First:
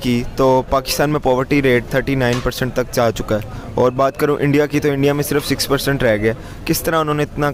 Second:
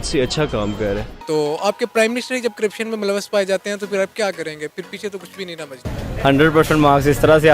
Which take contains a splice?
second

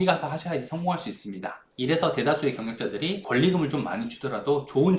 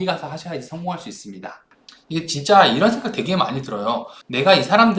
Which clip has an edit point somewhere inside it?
second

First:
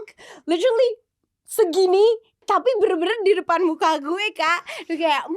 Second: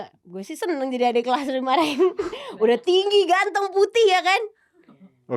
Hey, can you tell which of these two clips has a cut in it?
first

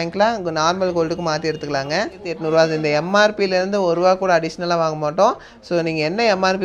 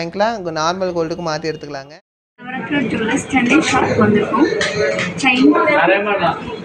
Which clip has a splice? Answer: first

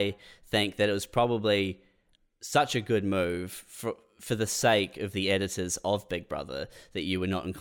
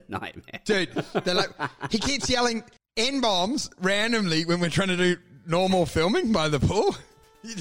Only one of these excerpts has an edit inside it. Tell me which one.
second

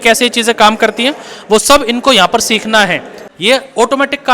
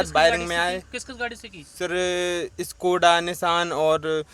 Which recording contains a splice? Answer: first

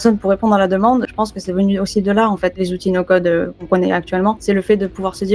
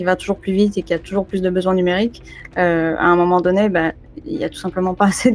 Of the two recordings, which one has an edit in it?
first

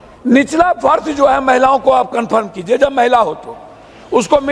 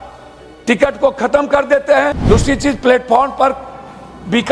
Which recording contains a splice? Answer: second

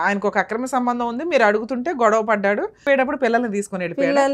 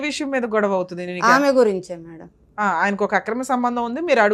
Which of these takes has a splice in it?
first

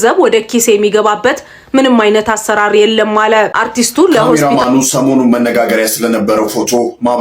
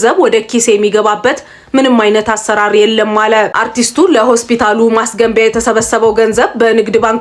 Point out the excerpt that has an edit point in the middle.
first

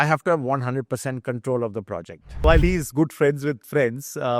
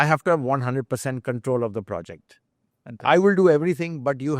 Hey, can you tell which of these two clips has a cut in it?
first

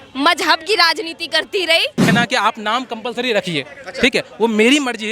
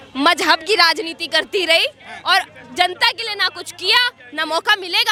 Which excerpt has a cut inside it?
first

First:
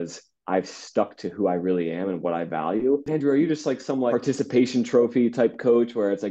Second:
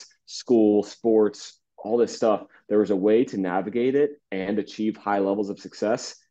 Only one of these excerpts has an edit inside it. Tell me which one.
first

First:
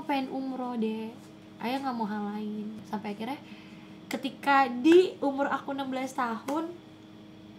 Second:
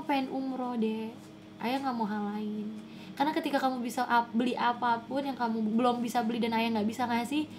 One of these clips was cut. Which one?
first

